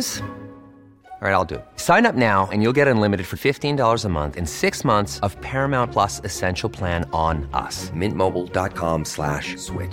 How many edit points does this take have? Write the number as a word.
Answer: zero